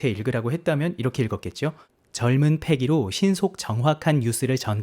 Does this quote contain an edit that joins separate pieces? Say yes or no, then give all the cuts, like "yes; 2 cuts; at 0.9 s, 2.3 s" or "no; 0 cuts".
no; 0 cuts